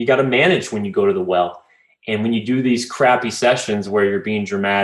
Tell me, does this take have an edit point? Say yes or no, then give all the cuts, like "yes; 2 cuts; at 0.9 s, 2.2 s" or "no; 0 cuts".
no; 0 cuts